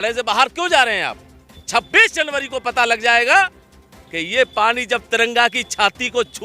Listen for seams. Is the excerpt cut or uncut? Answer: cut